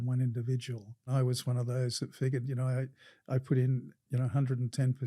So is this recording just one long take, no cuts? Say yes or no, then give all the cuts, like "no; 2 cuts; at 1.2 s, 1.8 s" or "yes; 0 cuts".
no; 1 cut; at 1.1 s